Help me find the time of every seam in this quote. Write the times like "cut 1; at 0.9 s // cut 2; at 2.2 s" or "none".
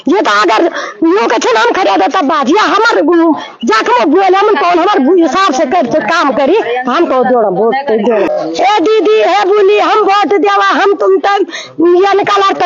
cut 1; at 8.3 s